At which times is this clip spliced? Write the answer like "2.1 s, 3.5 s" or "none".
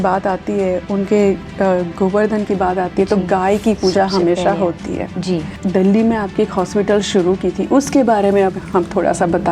5.5 s